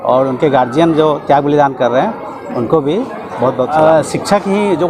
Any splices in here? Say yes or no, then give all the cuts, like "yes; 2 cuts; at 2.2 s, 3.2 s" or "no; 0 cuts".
yes; 1 cut; at 3.7 s